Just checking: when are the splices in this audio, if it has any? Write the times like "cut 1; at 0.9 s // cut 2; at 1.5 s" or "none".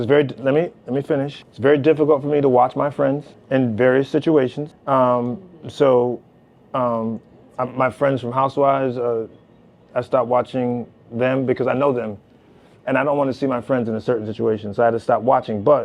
cut 1; at 1.4 s // cut 2; at 3.3 s // cut 3; at 4.7 s